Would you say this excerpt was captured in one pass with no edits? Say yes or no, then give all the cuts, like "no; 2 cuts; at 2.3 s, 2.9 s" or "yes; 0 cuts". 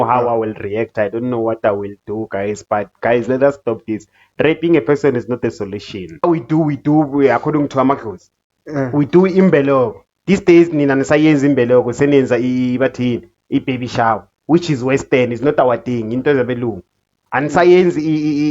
no; 1 cut; at 6.2 s